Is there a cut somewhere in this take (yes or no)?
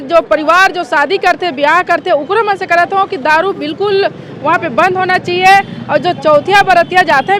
no